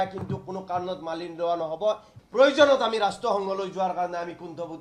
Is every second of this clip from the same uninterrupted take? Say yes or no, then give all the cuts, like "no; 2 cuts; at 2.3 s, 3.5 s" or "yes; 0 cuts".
no; 1 cut; at 2.1 s